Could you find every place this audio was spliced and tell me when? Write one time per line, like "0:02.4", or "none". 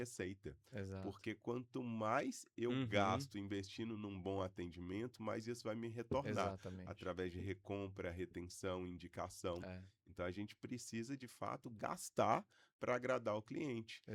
none